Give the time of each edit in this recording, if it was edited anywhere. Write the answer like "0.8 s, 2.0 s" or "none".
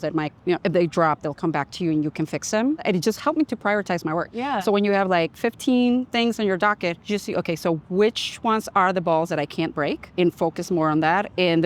2.8 s, 7.0 s, 10.0 s